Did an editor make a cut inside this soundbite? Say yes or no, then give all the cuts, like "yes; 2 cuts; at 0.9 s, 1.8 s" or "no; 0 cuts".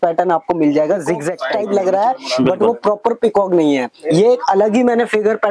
yes; 1 cut; at 1.3 s